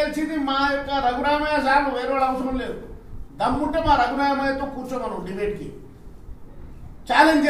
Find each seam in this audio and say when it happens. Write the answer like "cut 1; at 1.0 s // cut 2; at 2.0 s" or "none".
none